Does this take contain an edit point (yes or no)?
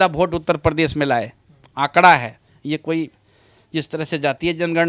no